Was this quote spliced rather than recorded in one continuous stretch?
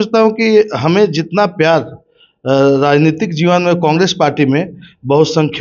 no; 0 cuts

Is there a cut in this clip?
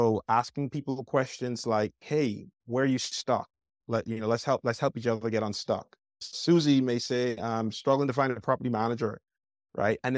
yes; 3 cuts; at 2.5 s, 6.2 s, 7.4 s

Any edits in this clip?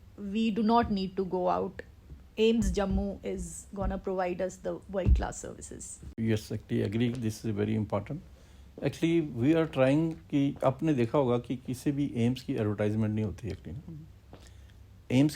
no; 0 cuts

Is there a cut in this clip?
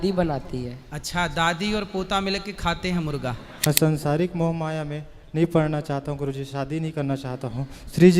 yes; 1 cut; at 3.5 s

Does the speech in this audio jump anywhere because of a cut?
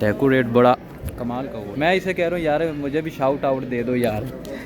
yes; 1 cut; at 1.7 s

